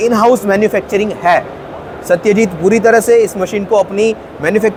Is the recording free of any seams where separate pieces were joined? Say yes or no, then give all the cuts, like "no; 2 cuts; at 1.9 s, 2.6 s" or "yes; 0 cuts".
yes; 0 cuts